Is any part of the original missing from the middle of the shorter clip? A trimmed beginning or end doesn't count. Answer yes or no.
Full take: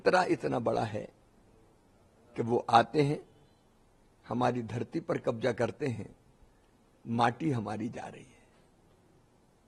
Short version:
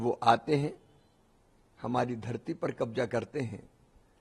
no